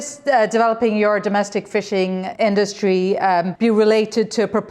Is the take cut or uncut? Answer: cut